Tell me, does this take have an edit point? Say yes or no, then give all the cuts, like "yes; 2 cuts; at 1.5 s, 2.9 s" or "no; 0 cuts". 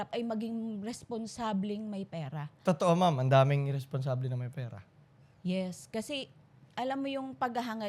no; 0 cuts